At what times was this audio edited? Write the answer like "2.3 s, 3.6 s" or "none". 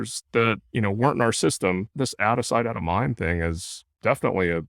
1.9 s